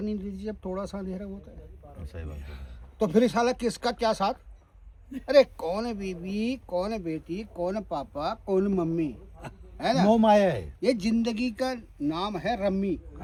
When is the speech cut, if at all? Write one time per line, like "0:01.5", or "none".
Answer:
none